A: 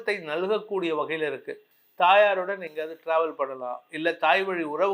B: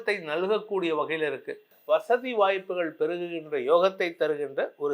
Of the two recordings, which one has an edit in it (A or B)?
B